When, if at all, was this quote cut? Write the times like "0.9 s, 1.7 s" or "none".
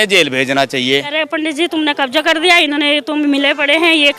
1.1 s